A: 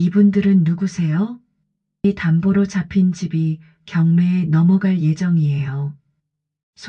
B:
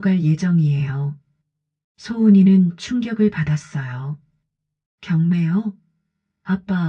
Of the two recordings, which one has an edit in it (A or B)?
A